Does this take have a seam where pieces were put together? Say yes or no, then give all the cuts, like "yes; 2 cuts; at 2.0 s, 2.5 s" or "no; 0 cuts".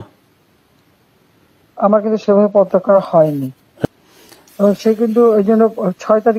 yes; 1 cut; at 3.8 s